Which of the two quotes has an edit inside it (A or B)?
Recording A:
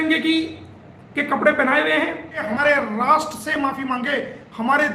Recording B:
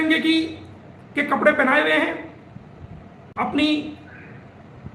A